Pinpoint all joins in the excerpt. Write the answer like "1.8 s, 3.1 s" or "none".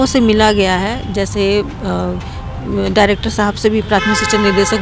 none

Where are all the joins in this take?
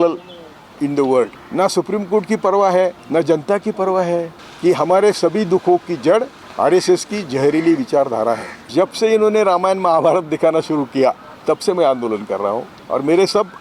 1.4 s, 3.0 s, 4.4 s, 6.4 s, 8.7 s, 11.3 s, 12.7 s

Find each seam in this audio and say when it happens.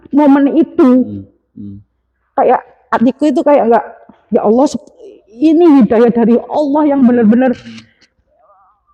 none

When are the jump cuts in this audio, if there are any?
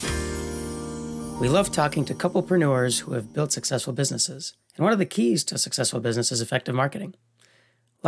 1.3 s

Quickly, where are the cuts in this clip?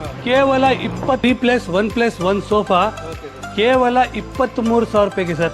1.2 s

